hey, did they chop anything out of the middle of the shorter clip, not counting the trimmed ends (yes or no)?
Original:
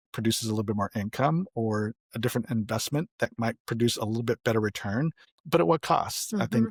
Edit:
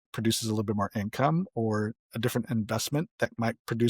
no